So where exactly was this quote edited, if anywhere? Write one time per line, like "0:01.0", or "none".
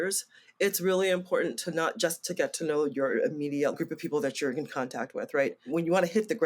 0:03.8
0:05.7